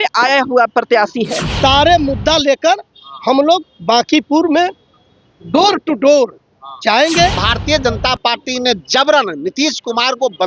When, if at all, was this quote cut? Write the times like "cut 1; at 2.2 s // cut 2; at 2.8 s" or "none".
cut 1; at 1.5 s // cut 2; at 7.4 s